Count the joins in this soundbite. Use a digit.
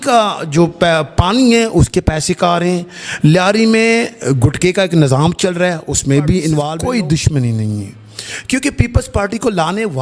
1